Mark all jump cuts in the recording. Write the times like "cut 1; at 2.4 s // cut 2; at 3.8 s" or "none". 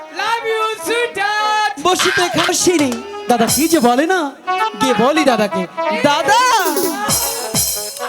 cut 1; at 2.5 s